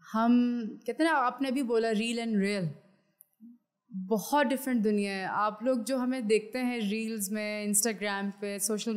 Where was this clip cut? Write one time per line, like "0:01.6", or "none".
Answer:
none